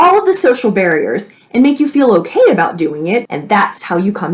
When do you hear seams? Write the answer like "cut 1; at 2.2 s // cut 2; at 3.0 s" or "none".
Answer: cut 1; at 3.3 s